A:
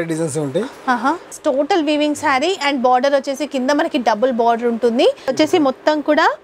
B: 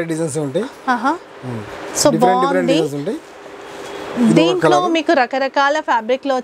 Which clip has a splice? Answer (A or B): A